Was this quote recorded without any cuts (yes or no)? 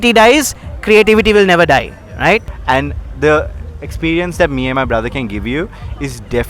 no